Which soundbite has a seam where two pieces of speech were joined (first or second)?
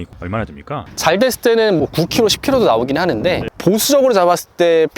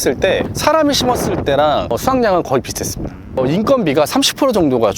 second